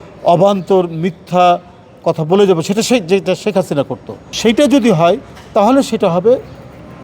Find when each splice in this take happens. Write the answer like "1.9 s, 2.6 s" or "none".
4.3 s